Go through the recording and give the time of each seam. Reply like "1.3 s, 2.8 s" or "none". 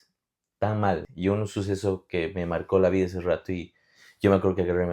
1.0 s